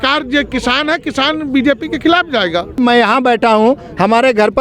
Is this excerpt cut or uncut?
cut